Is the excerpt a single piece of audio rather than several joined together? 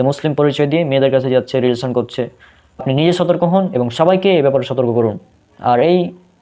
no; 1 cut; at 2.8 s

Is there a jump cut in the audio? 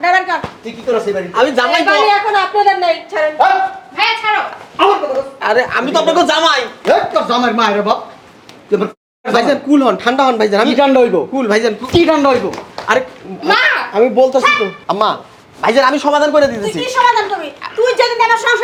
no; 0 cuts

